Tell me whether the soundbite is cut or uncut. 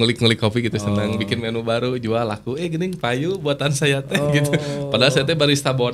uncut